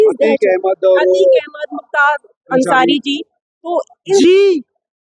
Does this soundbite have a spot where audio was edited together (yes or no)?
no